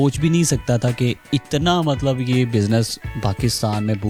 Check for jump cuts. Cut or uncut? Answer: uncut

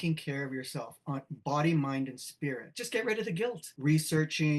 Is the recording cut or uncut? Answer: cut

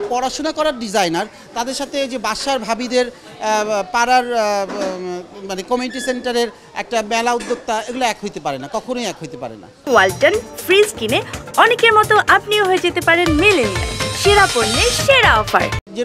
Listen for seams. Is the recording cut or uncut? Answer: uncut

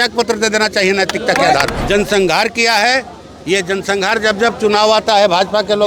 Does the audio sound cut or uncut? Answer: cut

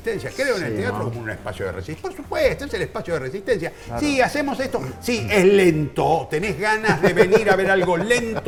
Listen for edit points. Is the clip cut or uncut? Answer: uncut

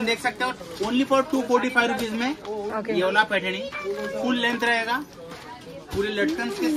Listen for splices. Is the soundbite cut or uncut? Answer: uncut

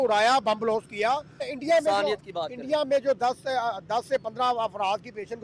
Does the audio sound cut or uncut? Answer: cut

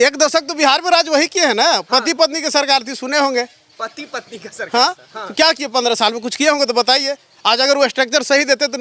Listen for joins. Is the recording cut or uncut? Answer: uncut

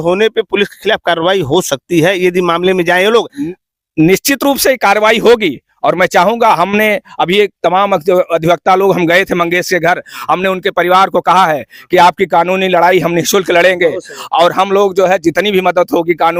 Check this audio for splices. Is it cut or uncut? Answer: uncut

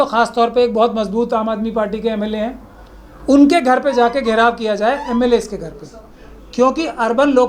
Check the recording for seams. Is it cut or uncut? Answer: uncut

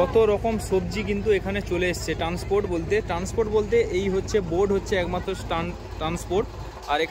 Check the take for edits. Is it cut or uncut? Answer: uncut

